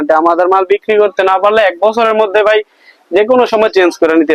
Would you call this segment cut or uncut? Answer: uncut